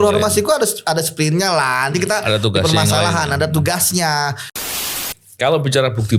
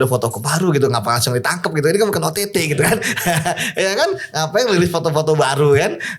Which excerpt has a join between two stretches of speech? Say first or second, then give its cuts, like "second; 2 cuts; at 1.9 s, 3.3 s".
first; 1 cut; at 4.7 s